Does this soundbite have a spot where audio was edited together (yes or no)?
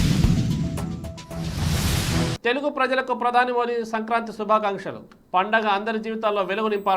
no